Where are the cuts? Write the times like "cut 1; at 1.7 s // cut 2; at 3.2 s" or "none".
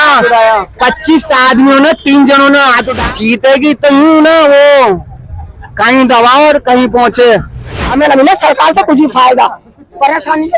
cut 1; at 3.0 s // cut 2; at 7.8 s